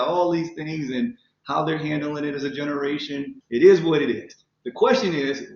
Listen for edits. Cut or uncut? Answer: cut